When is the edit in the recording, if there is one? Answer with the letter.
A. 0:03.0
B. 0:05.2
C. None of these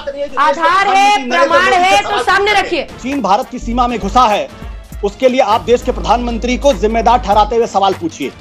A